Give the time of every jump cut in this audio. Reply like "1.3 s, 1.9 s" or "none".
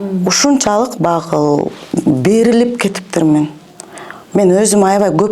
none